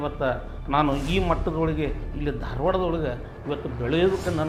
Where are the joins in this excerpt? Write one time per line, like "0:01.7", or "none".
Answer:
none